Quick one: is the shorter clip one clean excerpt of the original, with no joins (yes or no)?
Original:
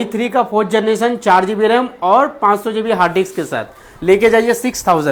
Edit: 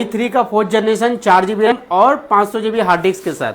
no